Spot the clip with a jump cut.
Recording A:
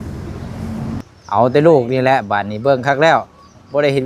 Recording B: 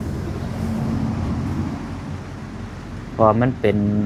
A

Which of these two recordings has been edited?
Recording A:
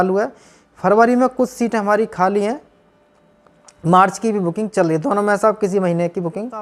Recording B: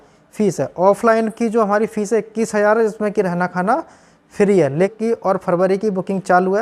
B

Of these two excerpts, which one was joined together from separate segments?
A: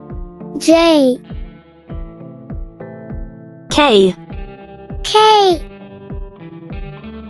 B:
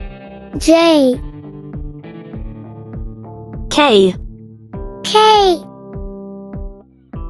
A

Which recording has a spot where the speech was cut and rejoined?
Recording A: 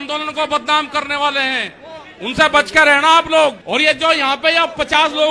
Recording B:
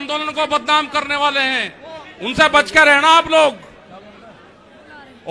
A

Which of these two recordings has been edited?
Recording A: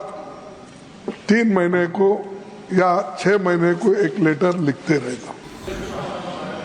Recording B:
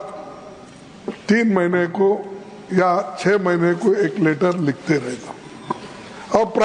A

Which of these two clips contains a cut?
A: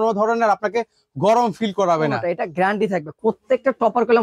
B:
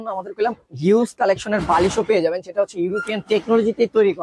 A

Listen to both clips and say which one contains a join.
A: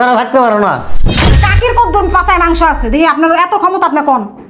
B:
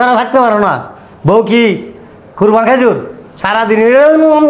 A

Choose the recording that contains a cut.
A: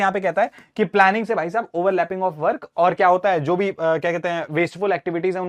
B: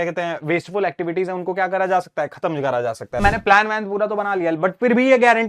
B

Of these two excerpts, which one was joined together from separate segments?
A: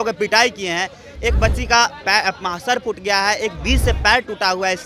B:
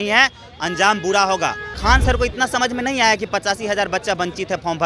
B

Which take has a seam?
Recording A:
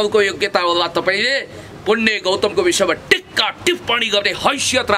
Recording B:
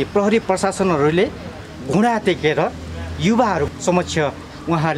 B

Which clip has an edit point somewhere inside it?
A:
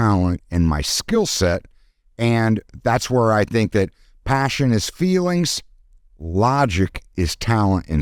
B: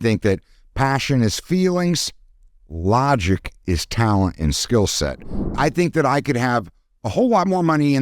B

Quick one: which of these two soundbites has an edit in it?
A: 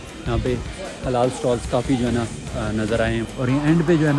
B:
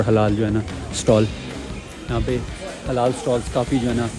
A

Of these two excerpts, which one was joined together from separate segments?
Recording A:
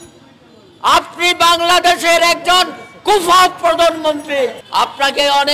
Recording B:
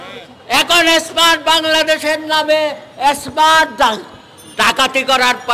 A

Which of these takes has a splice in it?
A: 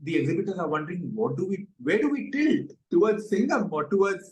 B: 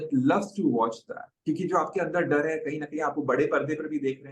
A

